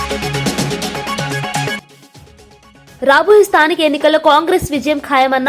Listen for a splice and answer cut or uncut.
cut